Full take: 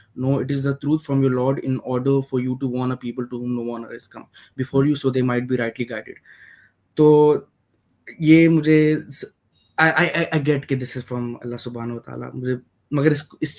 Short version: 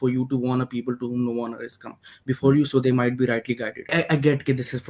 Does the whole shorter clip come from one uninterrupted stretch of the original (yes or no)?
no